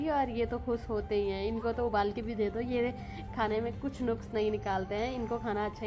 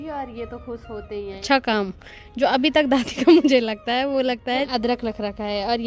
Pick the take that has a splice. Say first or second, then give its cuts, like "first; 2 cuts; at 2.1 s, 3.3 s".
second; 2 cuts; at 1.4 s, 4.7 s